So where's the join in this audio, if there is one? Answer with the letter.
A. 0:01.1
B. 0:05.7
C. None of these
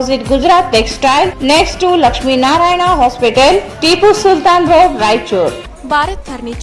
B